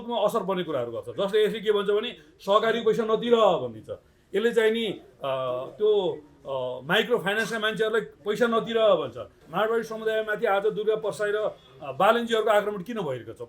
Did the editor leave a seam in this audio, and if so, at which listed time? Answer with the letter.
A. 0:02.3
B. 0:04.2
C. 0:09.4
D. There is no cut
C